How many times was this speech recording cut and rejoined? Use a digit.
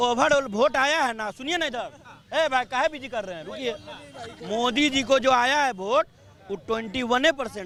0